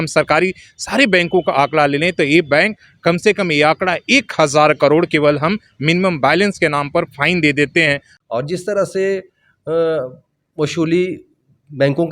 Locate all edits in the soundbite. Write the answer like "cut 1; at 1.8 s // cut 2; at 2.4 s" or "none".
cut 1; at 8.1 s